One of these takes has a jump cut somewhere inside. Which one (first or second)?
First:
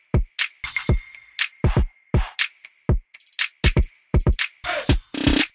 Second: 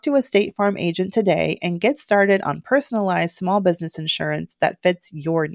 first